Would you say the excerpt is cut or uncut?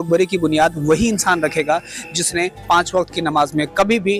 uncut